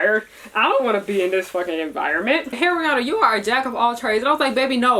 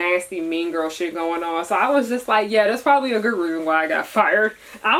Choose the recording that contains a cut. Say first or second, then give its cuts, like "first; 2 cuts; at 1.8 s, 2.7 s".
first; 1 cut; at 2.5 s